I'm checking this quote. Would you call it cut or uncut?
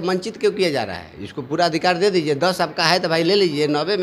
uncut